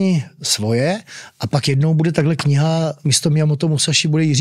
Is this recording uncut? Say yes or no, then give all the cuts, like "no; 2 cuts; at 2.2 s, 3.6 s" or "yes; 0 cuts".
no; 1 cut; at 3.1 s